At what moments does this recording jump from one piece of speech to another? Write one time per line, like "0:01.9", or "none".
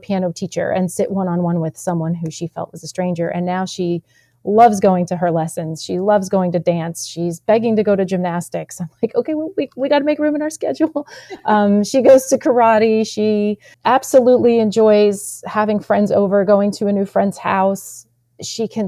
none